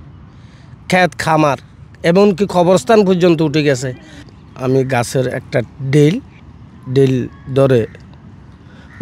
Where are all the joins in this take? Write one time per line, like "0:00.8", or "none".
0:04.2